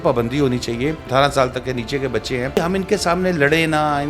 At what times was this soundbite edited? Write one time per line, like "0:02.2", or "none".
0:01.1
0:02.6

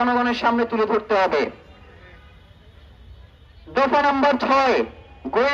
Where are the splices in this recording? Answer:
none

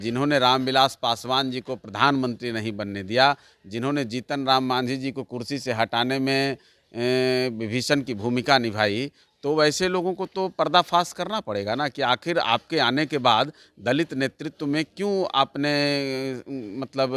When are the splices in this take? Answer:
none

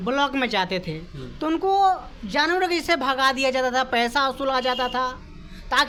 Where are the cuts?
none

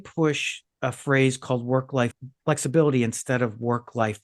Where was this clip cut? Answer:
none

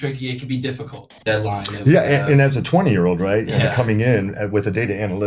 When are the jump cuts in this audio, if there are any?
0:01.1

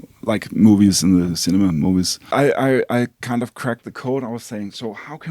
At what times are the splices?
0:02.3

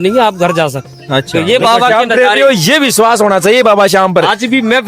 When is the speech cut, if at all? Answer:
0:01.3

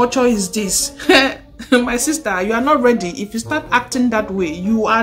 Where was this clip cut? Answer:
0:03.1

